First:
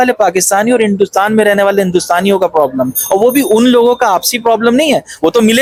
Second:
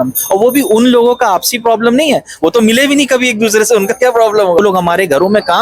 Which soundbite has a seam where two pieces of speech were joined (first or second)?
second